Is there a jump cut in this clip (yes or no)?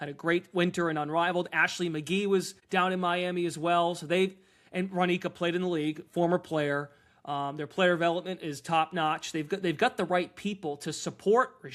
yes